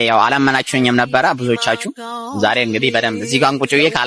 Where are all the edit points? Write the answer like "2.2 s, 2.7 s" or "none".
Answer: none

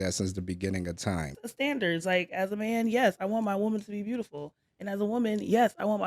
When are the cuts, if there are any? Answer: 1.4 s

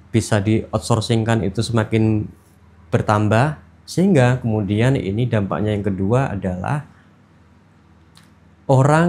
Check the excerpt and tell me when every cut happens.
none

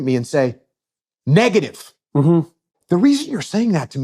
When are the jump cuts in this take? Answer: 2.7 s

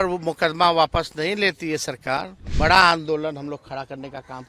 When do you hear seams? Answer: 2.4 s

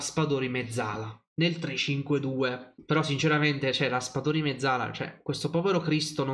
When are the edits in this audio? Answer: 2.7 s

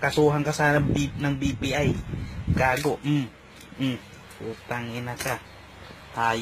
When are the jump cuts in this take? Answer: 1.2 s

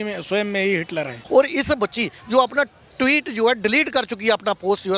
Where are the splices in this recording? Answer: 1.2 s

